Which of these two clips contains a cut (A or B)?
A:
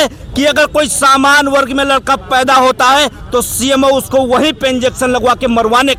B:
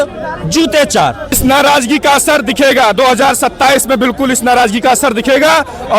B